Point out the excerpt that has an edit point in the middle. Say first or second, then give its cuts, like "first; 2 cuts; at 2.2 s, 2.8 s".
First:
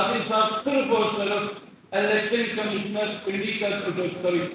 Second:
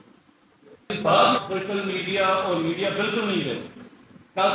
second; 1 cut; at 1.4 s